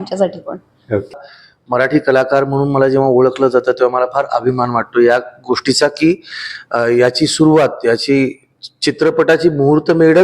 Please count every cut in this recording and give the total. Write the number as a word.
one